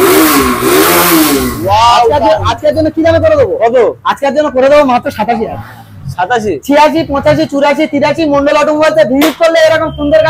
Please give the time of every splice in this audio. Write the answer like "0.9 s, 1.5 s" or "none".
none